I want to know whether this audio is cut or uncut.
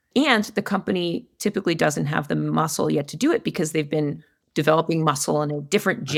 uncut